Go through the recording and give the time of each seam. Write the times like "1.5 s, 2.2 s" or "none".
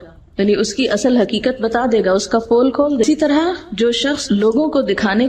3.0 s